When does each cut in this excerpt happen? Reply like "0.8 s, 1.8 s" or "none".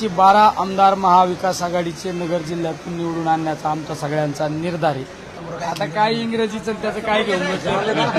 5.4 s